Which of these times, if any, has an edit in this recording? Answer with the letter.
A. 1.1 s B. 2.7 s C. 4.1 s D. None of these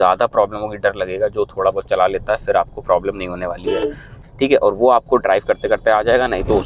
C